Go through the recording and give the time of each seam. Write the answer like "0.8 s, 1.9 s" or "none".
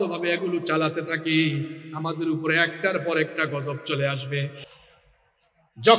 4.6 s